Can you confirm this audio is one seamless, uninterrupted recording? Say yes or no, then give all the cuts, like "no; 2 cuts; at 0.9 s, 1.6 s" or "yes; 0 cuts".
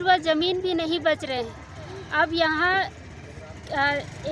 yes; 0 cuts